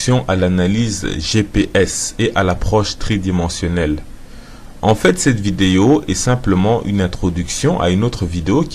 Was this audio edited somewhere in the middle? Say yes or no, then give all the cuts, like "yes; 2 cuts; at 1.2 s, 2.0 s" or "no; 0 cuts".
yes; 1 cut; at 3.0 s